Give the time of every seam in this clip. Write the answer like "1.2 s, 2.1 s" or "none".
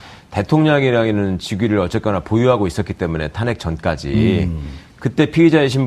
4.3 s